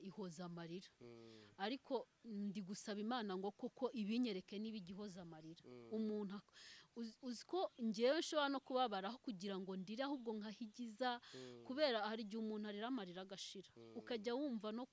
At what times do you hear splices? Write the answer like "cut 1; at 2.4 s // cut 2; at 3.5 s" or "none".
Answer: none